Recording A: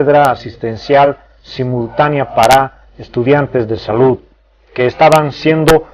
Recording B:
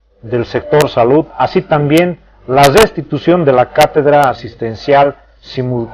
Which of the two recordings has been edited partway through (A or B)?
A